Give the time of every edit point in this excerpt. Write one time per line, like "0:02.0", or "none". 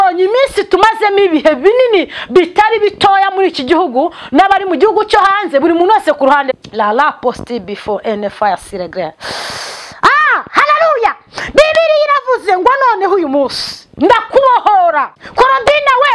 0:06.6
0:15.2

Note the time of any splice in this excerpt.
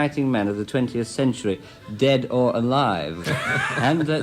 0:03.2

